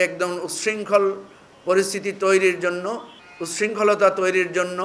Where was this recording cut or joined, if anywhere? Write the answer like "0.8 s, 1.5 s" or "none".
none